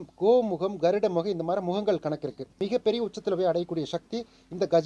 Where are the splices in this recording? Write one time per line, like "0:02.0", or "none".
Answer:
0:02.4